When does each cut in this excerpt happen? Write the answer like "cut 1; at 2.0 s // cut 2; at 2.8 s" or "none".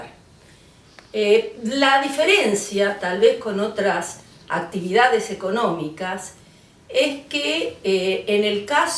cut 1; at 3.8 s